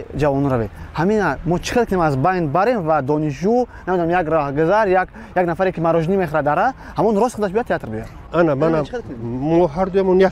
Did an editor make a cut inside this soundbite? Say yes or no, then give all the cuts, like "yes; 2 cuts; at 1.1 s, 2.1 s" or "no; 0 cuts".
no; 0 cuts